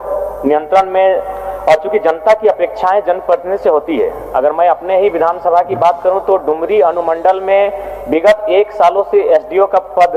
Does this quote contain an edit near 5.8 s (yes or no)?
no